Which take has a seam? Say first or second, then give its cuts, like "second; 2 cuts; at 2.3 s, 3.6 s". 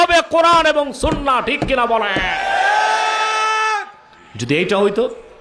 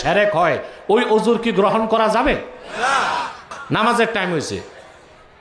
second; 1 cut; at 3.5 s